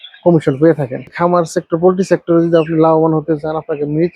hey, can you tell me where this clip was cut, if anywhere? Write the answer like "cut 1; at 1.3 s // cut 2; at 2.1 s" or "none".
cut 1; at 1.1 s